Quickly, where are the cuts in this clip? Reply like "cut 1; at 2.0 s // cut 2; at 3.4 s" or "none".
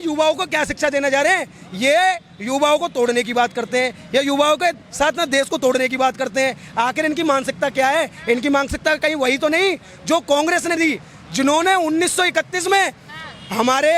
none

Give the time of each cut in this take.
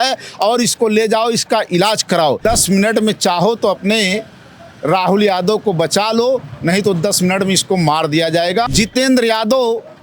cut 1; at 2.4 s // cut 2; at 8.7 s

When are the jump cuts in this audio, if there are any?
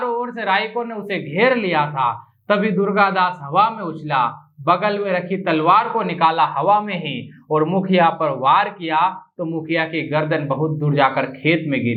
none

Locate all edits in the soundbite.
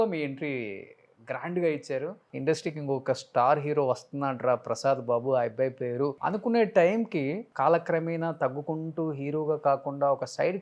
cut 1; at 2.3 s // cut 2; at 6.2 s // cut 3; at 7.5 s

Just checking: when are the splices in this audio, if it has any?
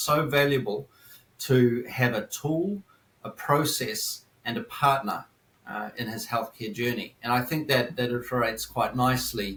none

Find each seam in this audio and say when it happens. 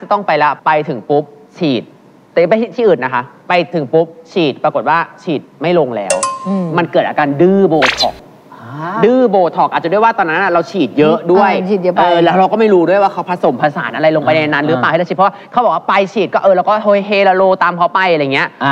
none

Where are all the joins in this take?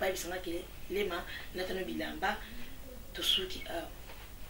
none

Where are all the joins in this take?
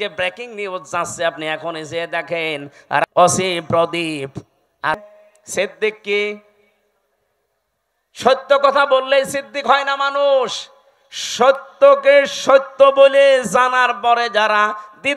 cut 1; at 3.0 s // cut 2; at 5.1 s

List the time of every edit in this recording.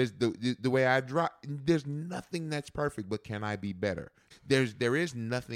cut 1; at 4.2 s

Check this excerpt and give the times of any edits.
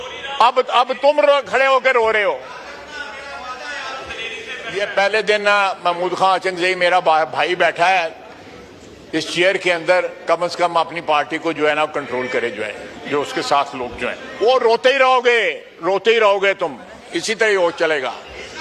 cut 1; at 4.6 s // cut 2; at 14.2 s

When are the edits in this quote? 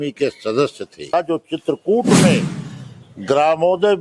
cut 1; at 1.1 s

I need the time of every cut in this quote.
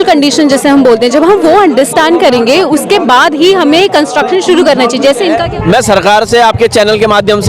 cut 1; at 5.4 s

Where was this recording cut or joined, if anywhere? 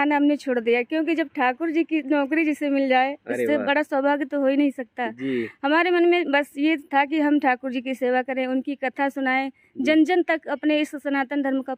none

